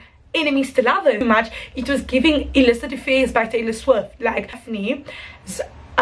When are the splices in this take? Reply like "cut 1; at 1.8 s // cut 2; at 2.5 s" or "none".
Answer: cut 1; at 1.2 s // cut 2; at 4.6 s